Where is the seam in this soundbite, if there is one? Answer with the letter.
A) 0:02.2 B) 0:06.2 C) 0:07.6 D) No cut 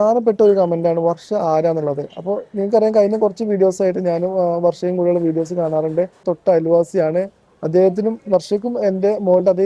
B